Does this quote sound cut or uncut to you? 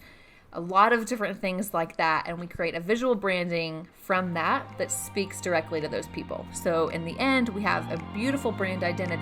uncut